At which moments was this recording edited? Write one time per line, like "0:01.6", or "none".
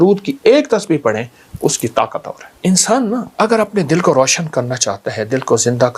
0:02.4
0:03.3

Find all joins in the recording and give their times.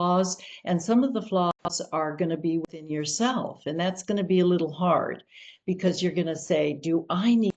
none

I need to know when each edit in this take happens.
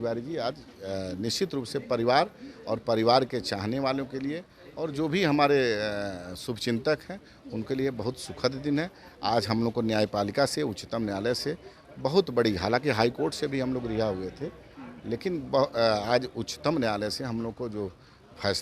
none

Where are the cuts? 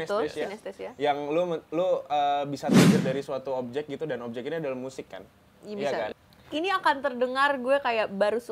0:06.1

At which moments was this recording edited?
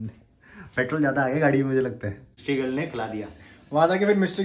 0:02.3

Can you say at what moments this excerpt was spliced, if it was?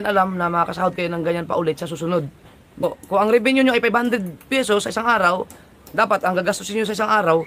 0:02.8

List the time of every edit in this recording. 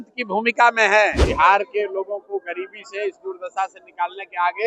0:01.2

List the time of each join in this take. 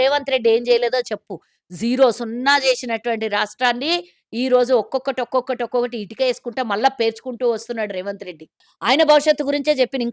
0:08.7

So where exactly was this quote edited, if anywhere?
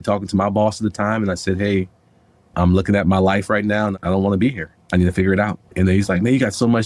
0:03.9

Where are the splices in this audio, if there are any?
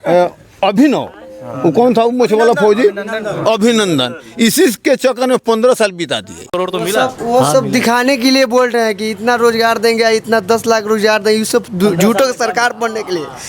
0:06.6

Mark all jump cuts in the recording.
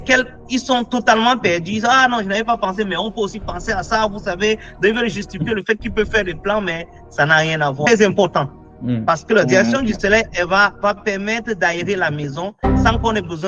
0:07.8

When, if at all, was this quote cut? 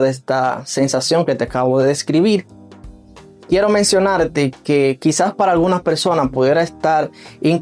none

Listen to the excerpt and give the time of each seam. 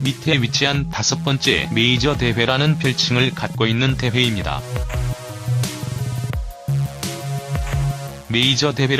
0:08.0

